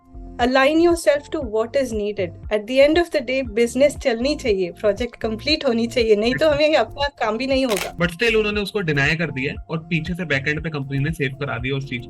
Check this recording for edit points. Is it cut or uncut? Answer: cut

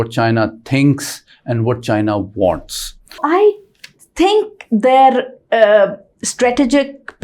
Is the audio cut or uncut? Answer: cut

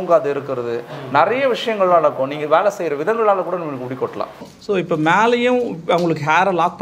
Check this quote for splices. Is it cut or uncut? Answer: cut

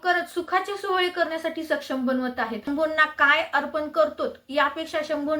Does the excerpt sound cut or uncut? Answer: cut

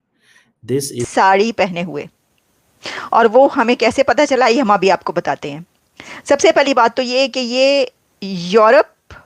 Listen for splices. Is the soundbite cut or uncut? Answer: cut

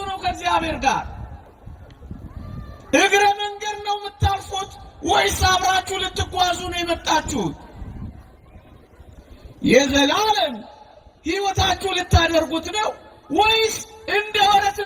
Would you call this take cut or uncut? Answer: uncut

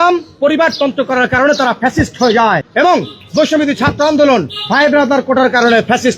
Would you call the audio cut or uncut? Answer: uncut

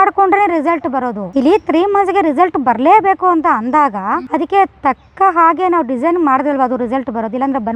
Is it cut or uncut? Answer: uncut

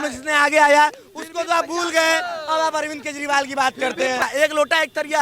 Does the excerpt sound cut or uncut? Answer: cut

